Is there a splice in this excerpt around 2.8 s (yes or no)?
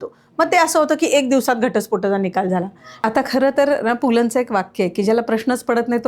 yes